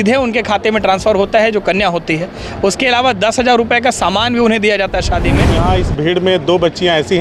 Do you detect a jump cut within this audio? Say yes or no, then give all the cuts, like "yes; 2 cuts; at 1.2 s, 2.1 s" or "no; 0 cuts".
yes; 1 cut; at 5.5 s